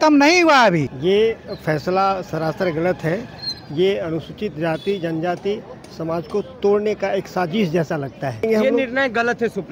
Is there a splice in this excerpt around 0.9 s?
yes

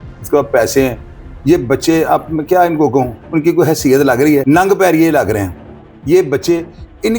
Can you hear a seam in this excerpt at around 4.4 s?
yes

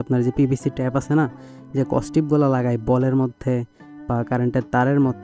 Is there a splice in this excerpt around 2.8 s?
no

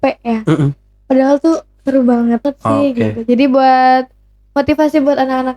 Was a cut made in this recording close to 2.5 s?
yes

